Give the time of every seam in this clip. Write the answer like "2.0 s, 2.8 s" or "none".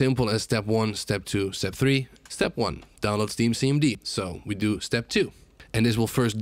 2.1 s, 4.0 s